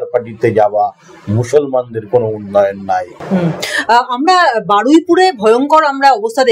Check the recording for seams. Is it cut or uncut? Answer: uncut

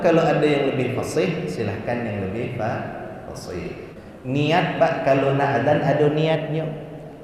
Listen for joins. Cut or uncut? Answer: cut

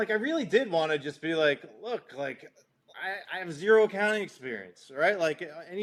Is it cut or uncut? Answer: uncut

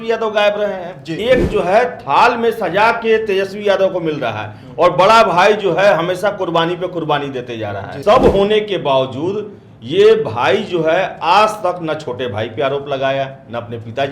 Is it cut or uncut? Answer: cut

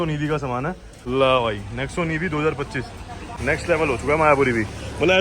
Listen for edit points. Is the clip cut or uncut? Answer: cut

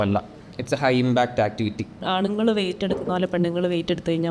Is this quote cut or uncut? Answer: cut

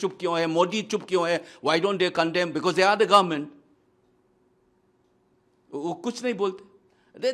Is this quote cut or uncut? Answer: uncut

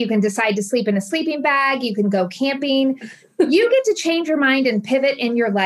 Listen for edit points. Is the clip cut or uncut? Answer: uncut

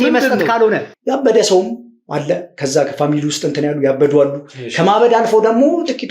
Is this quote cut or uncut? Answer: cut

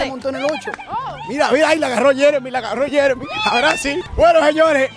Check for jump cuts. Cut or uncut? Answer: uncut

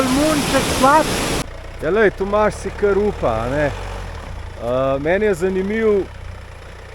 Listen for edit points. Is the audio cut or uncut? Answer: cut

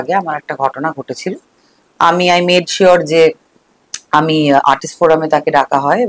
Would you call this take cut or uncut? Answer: uncut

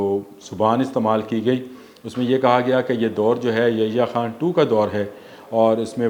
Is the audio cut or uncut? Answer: uncut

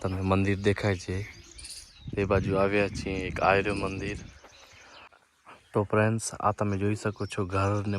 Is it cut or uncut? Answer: cut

